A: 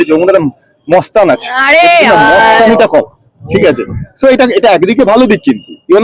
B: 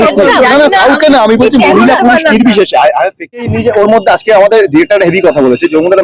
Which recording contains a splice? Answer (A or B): B